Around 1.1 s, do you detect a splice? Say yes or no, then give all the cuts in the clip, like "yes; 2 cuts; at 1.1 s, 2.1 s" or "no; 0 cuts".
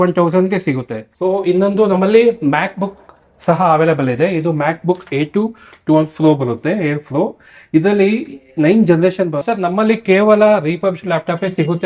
yes; 2 cuts; at 1.1 s, 9.4 s